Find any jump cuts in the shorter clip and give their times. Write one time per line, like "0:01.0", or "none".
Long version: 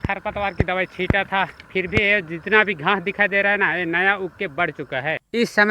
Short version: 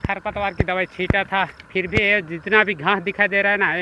none